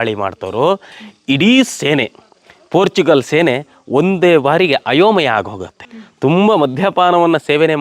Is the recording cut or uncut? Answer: cut